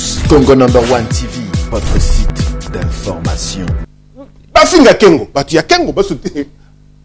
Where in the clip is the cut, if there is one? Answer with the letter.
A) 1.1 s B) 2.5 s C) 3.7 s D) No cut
C